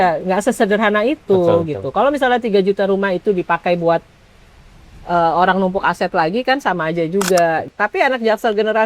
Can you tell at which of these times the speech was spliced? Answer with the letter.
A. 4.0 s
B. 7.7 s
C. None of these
B